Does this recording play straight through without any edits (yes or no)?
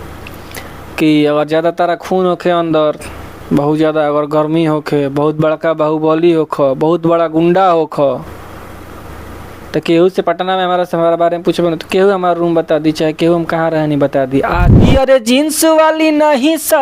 no